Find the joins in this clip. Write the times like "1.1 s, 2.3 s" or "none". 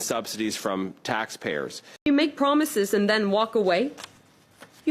1.9 s